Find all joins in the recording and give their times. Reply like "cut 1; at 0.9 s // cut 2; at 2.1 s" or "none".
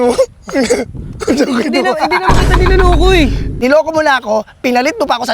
cut 1; at 3.5 s